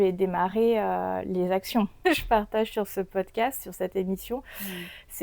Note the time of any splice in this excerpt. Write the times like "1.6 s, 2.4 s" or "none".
2.0 s